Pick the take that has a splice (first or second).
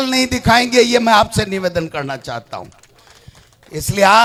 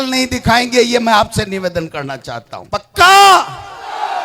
second